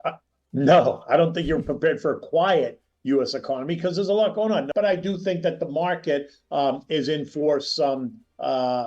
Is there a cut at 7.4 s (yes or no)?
no